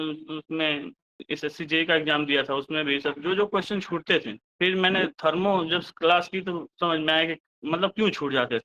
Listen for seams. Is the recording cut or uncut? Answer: cut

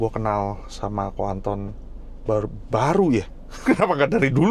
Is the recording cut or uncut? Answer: uncut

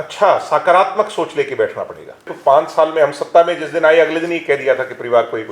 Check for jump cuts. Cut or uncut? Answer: cut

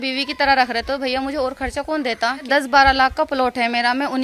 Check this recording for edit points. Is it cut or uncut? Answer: cut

